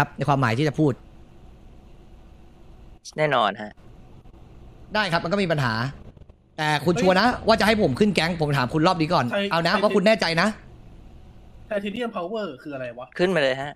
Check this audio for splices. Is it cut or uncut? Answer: uncut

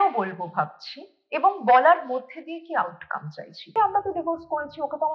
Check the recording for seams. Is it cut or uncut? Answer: cut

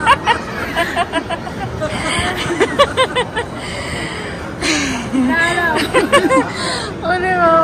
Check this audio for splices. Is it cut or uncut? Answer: uncut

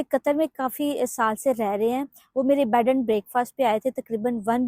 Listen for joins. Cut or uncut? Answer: uncut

